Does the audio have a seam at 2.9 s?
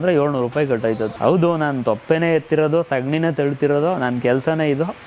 no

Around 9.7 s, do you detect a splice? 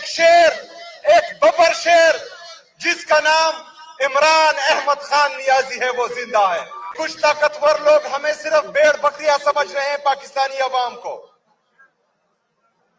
no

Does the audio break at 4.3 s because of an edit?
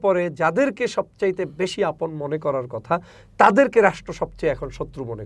no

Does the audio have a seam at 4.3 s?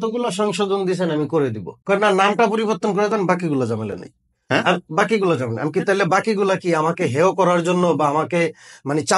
no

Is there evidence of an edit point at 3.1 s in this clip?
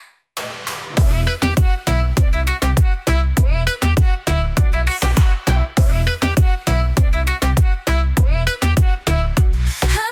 no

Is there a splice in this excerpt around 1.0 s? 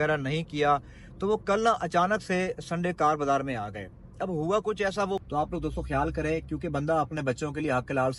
no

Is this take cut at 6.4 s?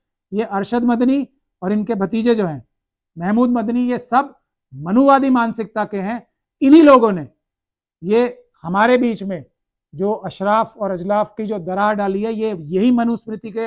no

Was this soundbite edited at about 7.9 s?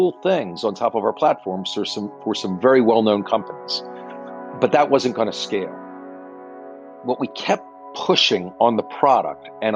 no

